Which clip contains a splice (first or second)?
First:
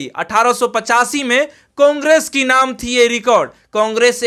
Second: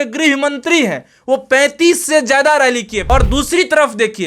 second